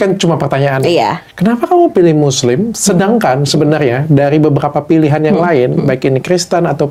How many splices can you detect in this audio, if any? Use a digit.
0